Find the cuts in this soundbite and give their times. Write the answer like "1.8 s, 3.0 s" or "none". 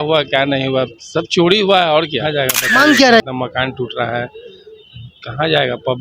3.2 s